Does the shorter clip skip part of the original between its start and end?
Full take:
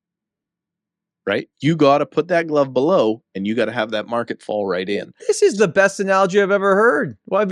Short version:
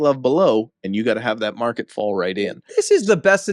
no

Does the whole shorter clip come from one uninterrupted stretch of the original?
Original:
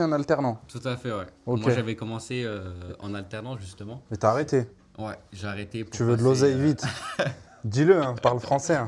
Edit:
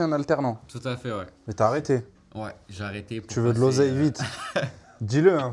no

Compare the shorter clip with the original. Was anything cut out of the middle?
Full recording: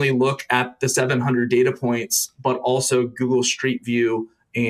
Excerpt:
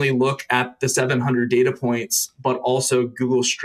no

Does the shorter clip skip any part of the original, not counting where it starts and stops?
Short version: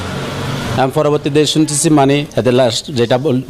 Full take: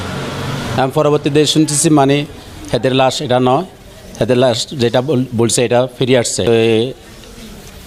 yes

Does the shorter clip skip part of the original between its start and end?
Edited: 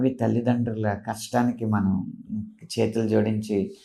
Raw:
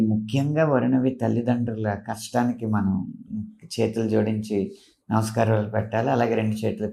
no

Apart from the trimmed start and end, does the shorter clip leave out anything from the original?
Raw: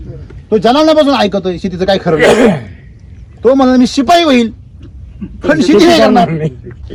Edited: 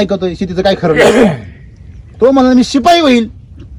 no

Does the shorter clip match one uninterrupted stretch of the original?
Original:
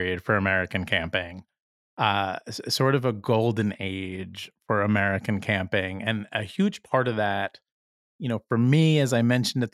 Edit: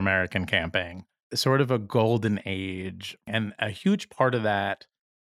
no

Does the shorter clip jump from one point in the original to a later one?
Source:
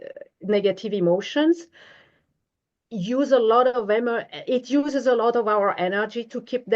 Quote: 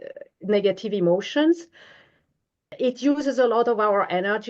yes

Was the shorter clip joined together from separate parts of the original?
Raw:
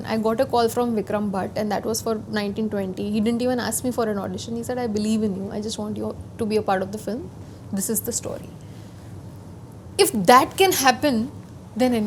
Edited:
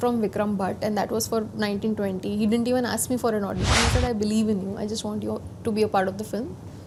no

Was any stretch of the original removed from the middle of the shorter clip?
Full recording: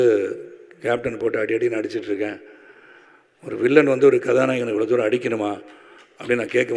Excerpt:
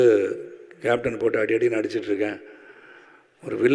no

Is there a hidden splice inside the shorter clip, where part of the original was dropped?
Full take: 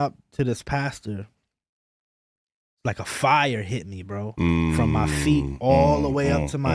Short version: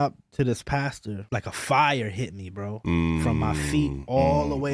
yes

